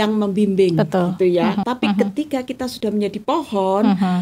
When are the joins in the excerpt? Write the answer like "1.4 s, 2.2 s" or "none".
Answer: 1.6 s